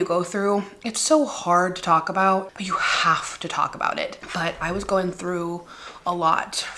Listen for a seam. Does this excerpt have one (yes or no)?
yes